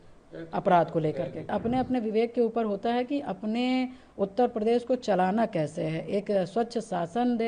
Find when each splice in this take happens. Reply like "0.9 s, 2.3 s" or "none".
1.5 s